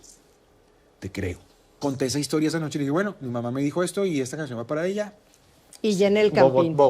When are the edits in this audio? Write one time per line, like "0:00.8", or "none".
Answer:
0:01.8